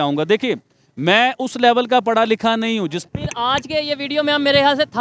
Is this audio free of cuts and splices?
no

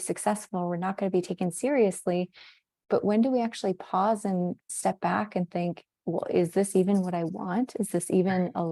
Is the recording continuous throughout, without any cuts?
yes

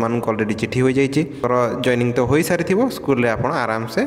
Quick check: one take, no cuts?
no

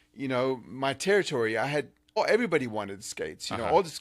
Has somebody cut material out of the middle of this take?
yes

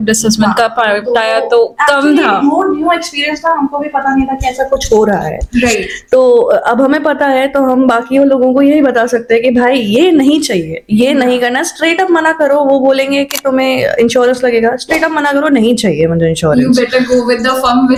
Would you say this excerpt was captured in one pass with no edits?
yes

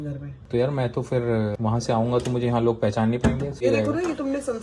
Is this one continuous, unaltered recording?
no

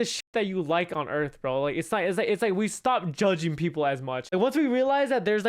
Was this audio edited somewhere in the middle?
yes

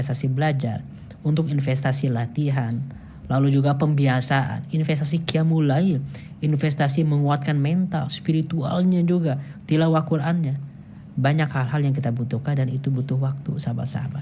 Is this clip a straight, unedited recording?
no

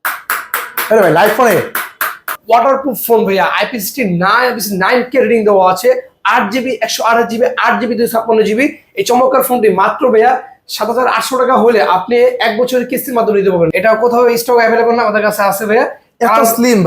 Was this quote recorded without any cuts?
no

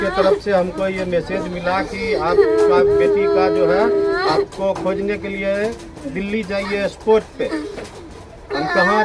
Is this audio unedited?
yes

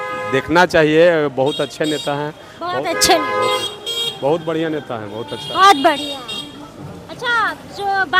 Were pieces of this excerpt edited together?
no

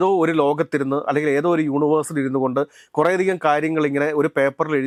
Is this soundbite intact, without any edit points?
yes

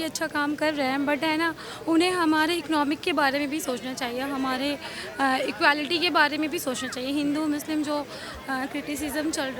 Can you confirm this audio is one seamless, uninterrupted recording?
yes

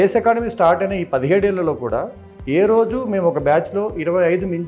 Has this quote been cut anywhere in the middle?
no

